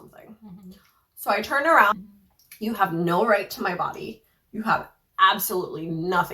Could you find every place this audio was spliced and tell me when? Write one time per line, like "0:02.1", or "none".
0:01.9